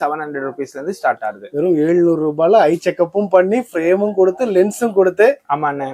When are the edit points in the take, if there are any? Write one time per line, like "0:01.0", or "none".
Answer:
none